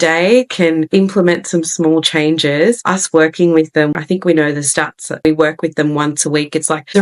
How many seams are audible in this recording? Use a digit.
1